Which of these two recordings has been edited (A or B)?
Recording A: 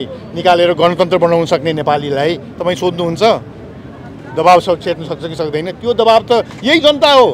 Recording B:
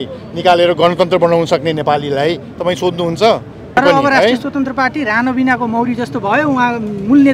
B